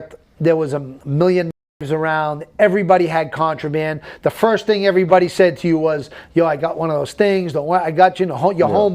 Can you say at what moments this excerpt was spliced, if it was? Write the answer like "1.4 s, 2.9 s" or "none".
1.0 s